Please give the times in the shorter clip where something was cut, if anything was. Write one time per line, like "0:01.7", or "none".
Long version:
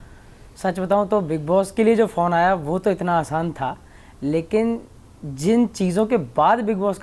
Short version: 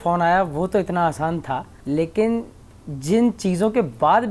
0:01.7